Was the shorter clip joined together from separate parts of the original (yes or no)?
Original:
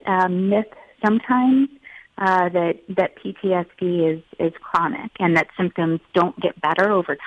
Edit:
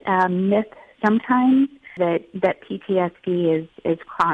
yes